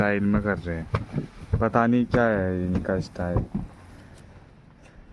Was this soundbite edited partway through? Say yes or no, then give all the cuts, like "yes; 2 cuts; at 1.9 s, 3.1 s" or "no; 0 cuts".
no; 0 cuts